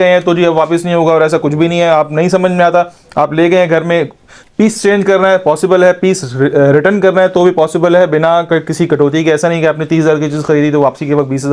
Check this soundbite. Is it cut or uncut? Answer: uncut